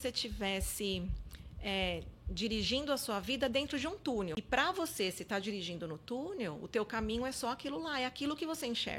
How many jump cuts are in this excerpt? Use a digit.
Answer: 1